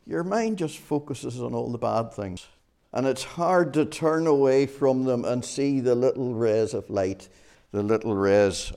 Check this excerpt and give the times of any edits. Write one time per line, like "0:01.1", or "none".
0:02.4